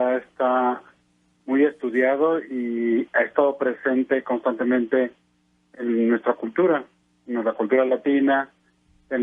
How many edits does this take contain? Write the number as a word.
one